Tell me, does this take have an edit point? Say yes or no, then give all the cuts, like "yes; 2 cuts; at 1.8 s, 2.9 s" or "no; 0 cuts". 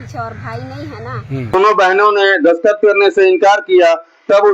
yes; 1 cut; at 1.5 s